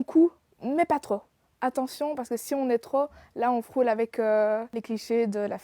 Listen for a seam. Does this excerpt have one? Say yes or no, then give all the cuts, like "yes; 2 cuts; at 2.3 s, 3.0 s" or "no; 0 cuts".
yes; 1 cut; at 4.7 s